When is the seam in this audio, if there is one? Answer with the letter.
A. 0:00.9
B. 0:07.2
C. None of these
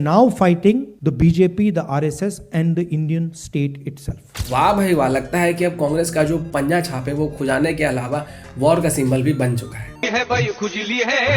A